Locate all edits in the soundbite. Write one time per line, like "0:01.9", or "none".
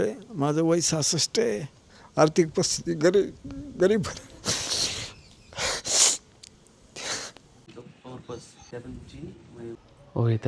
none